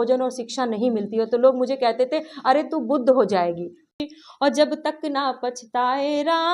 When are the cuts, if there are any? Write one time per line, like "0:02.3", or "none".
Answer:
0:03.9